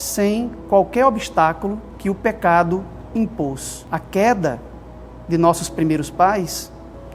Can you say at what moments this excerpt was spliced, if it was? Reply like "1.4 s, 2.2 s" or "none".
1.9 s, 3.7 s